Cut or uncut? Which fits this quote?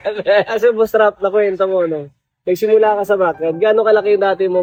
uncut